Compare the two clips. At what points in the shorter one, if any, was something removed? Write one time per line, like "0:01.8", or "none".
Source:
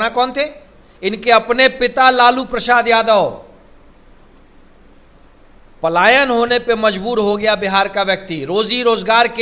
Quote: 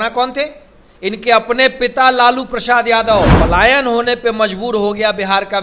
0:03.3

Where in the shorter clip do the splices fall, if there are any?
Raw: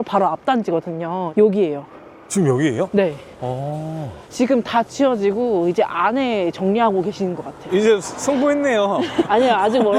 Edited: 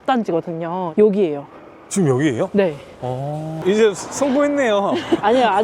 0:03.5

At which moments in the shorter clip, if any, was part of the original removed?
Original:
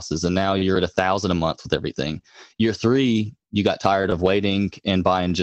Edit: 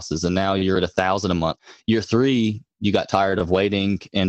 0:01.6

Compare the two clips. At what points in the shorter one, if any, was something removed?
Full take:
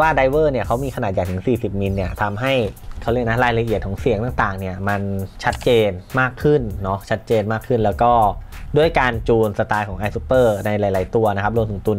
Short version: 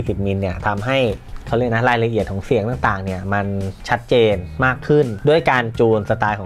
0:05.1

